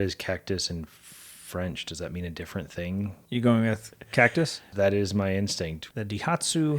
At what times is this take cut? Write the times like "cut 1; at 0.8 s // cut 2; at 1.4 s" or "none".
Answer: cut 1; at 3.2 s // cut 2; at 4.6 s // cut 3; at 5.8 s